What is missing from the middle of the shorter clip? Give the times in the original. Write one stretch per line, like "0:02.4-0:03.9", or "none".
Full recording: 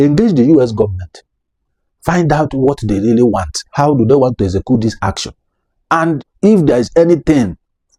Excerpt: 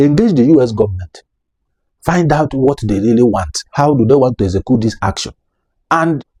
none